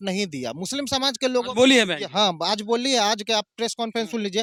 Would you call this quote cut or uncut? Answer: uncut